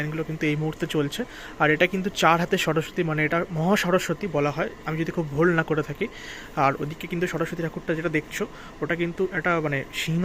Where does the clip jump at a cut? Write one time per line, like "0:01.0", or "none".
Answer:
none